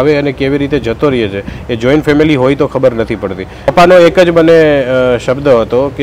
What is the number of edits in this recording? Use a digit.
1